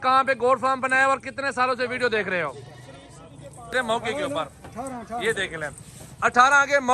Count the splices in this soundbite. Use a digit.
1